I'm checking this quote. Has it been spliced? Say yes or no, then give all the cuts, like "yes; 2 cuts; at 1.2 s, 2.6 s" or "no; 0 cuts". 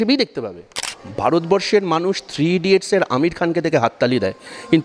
yes; 1 cut; at 1.0 s